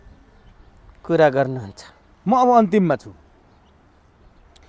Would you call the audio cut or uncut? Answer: uncut